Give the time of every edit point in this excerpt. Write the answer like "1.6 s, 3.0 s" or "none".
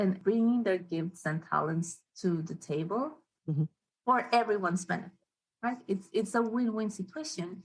none